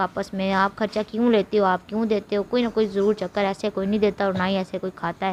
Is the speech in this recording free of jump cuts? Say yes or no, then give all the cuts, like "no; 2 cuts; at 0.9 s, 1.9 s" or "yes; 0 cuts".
yes; 0 cuts